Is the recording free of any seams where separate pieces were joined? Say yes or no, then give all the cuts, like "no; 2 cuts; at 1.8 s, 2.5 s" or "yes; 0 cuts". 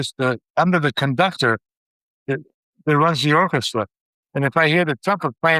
yes; 0 cuts